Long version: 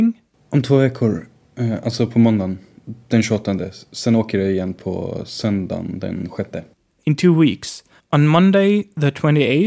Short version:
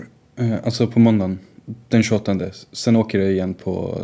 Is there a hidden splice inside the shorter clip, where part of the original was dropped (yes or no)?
no